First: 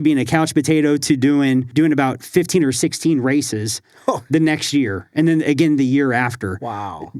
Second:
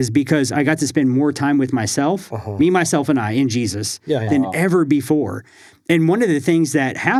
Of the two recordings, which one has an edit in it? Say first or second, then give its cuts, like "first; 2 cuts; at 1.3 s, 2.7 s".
first; 1 cut; at 1.7 s